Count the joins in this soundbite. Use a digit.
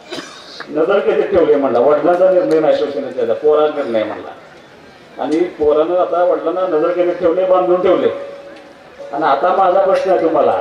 1